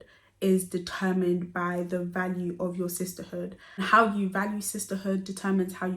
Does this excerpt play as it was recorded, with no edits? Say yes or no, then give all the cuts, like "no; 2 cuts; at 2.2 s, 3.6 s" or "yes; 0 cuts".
yes; 0 cuts